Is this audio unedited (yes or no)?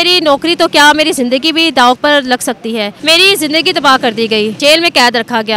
no